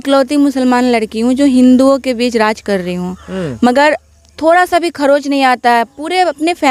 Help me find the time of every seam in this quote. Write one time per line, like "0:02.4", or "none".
none